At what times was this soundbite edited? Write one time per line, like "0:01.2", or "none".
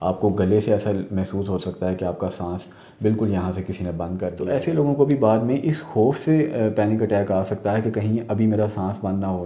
0:04.3

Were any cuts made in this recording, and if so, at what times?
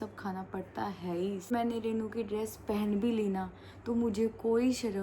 0:01.5

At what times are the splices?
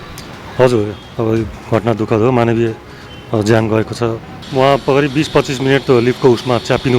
0:04.4

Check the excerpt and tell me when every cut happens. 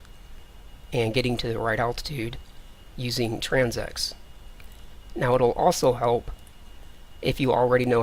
none

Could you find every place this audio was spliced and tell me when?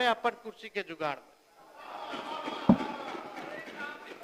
none

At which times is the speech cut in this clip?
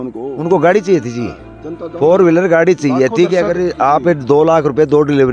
none

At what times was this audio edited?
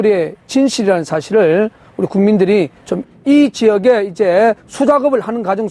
none

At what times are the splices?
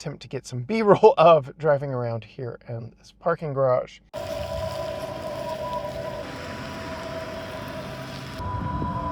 0:06.2
0:08.4

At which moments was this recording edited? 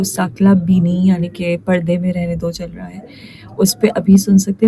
none

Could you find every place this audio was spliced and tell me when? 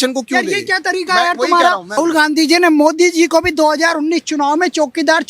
0:02.0

